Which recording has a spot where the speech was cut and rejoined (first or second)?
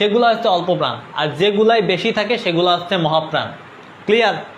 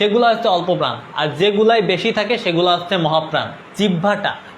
second